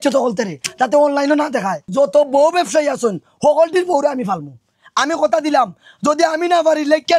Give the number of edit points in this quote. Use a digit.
1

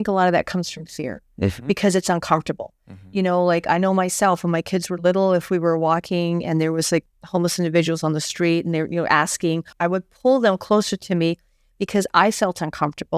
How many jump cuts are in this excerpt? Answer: 2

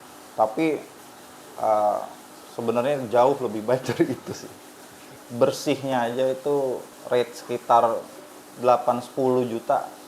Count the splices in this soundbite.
1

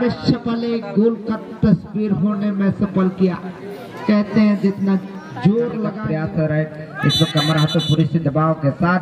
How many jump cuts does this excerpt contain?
1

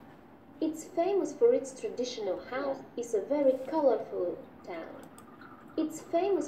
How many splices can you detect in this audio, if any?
1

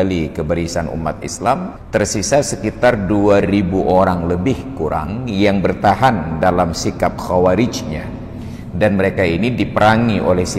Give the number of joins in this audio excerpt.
1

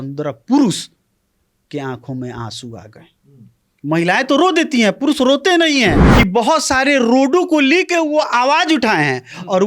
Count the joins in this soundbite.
1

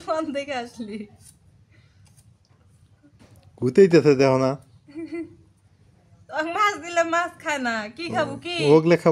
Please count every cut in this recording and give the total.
0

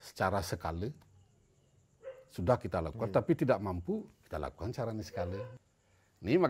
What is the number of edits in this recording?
1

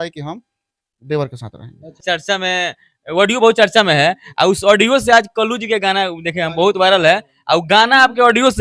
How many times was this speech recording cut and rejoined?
1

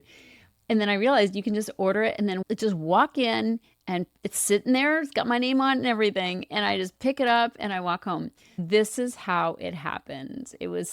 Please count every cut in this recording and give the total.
2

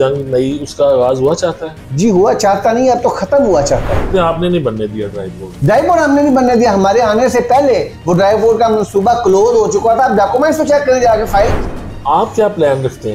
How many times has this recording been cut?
2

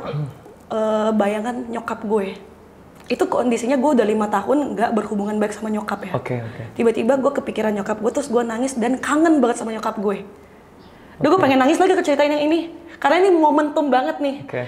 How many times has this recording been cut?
0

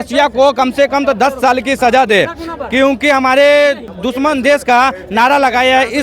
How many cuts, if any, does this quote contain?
1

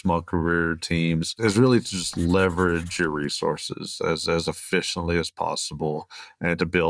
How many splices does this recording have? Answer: 1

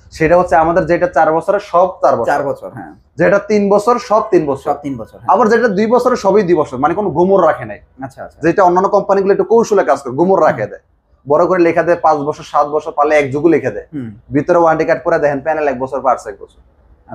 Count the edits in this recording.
0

